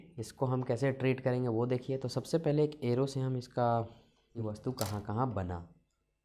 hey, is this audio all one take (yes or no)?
no